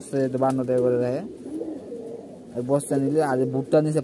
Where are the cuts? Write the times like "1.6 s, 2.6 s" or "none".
none